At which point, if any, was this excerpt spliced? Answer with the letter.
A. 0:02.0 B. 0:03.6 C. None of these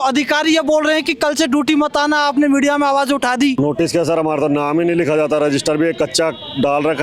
B